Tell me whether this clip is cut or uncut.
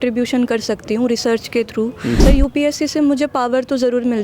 cut